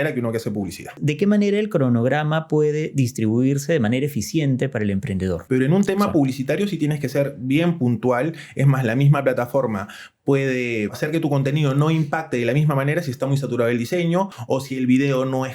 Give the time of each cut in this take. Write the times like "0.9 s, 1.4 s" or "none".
1.0 s, 5.4 s, 11.0 s, 14.4 s